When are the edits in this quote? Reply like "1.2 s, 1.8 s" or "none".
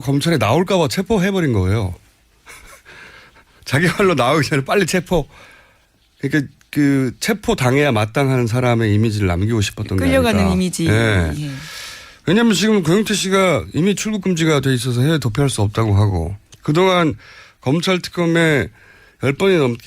5.4 s